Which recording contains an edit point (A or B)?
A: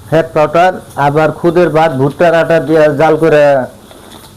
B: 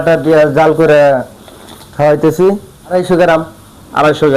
B